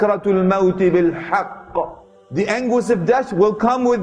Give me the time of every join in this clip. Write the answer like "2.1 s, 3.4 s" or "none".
none